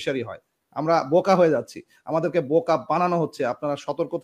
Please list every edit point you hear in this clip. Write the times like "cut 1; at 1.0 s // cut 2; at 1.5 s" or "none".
none